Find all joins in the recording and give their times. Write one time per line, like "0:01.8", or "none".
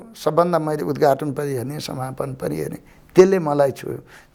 none